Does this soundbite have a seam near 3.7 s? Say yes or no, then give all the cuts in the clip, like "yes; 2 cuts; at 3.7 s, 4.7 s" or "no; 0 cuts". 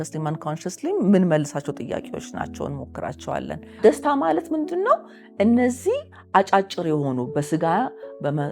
yes; 1 cut; at 3.7 s